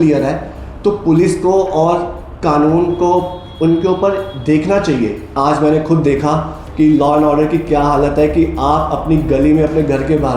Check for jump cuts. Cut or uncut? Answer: cut